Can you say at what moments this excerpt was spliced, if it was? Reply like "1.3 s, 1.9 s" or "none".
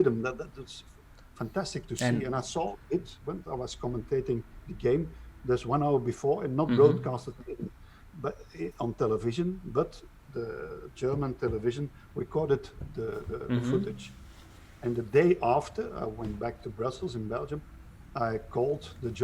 none